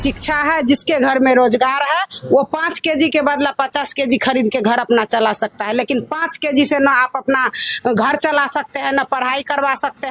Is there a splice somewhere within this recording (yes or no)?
no